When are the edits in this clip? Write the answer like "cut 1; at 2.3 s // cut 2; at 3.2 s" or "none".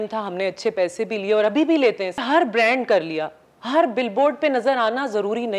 cut 1; at 2.2 s